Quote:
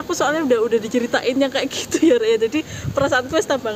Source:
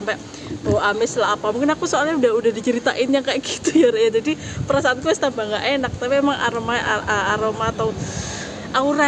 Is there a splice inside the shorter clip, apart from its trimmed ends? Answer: no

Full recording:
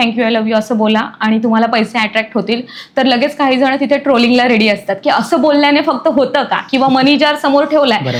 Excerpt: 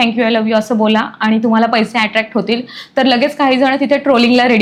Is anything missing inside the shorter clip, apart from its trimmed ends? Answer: no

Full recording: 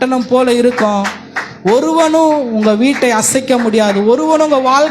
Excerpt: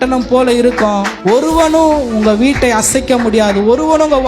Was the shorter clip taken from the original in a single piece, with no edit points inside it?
no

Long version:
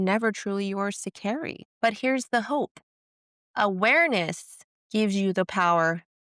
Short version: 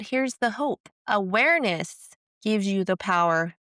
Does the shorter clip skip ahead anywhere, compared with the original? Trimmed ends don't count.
yes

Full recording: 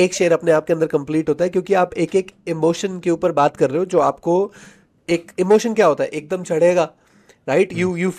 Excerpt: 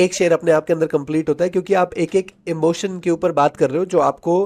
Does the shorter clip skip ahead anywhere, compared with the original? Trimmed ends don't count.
no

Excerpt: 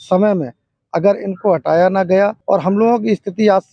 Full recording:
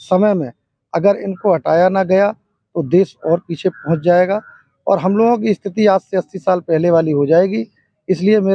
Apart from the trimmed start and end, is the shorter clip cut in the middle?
yes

